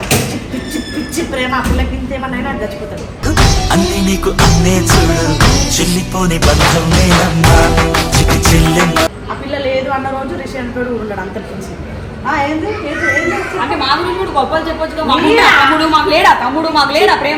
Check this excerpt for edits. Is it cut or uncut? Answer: uncut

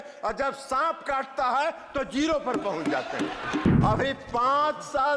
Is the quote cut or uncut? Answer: cut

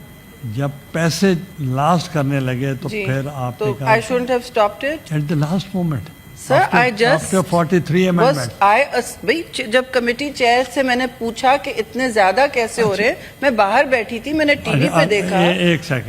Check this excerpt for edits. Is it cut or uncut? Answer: cut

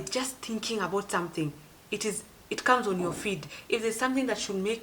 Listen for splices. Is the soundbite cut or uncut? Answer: cut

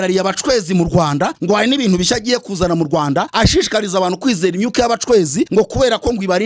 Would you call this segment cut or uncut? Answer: cut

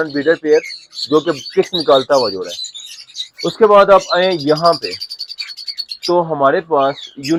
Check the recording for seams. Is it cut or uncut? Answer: uncut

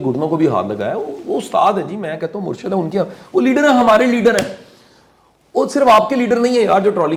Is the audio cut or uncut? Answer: uncut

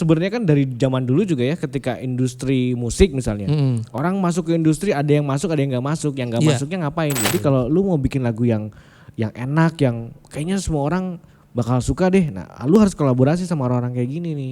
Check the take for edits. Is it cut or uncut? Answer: cut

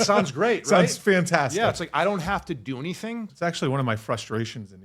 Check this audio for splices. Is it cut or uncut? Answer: cut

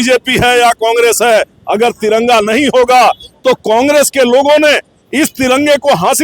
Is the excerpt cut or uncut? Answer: uncut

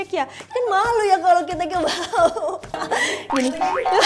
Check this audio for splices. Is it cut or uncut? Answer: cut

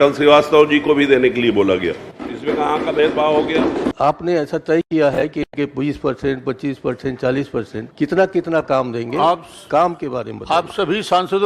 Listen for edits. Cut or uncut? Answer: cut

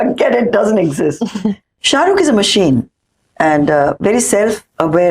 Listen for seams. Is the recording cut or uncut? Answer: cut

